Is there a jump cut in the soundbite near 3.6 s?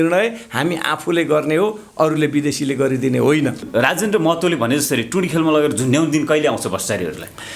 yes; 1 cut; at 3.6 s

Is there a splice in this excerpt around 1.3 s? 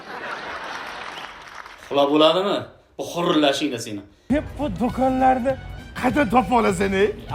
no; 1 cut; at 4.1 s

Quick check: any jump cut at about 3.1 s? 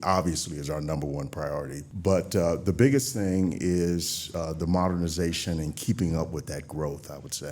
no; 1 cut; at 1.8 s

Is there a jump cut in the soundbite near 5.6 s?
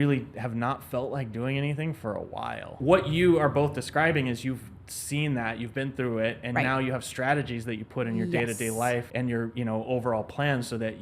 no; 2 cuts; at 2.7 s, 9.1 s

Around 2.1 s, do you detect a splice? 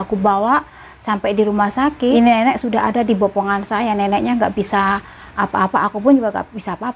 yes; 1 cut; at 2.1 s

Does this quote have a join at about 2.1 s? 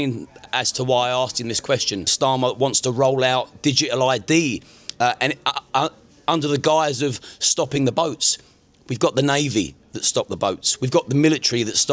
yes; 1 cut; at 2.1 s

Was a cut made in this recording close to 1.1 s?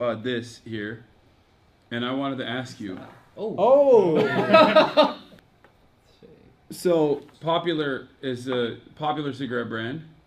no; 2 cuts; at 5.3 s, 7.3 s

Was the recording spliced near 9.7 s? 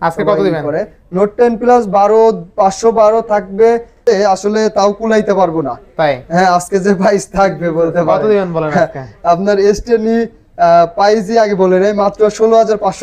no; 1 cut; at 4.0 s

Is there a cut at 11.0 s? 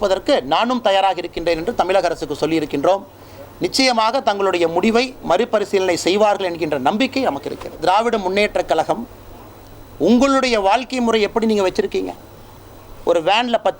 no; 1 cut; at 7.8 s

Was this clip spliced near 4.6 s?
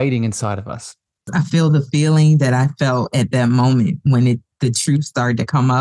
no; 1 cut; at 1.2 s

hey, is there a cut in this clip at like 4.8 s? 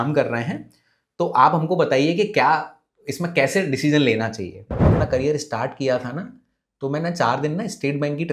yes; 1 cut; at 4.8 s

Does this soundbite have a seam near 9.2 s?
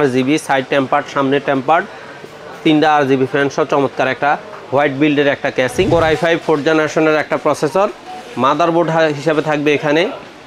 no; 1 cut; at 5.9 s

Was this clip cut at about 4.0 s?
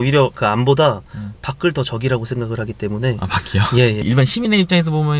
yes; 1 cut; at 4.0 s

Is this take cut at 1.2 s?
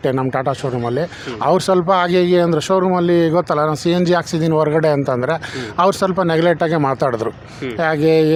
no; 0 cuts

